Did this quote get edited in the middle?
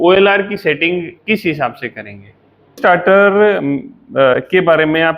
yes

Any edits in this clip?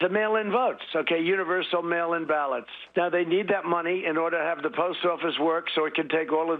yes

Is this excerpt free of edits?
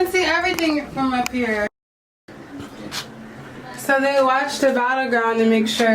no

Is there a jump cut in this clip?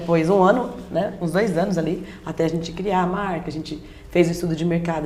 no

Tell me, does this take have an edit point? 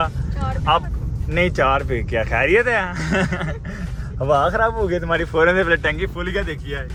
no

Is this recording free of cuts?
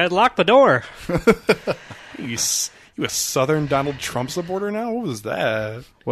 yes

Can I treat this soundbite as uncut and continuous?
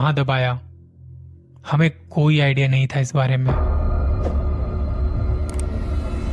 no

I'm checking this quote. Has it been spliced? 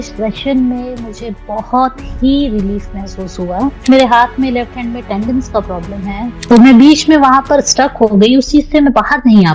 yes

